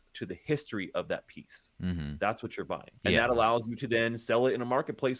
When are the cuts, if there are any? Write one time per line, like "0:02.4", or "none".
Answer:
0:02.9